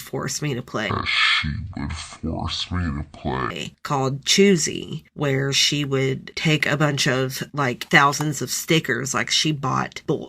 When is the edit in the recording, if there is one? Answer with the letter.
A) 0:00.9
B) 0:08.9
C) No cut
C